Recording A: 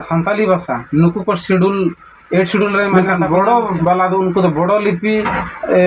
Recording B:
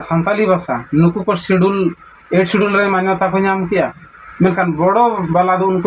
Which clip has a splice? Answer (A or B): A